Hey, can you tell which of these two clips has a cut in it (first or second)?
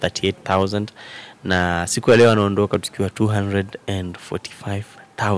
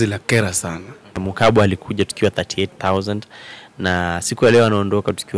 second